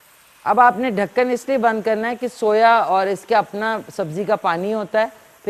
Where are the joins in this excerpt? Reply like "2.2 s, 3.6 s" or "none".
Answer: none